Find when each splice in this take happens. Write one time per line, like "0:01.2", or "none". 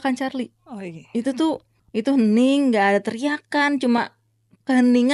0:01.7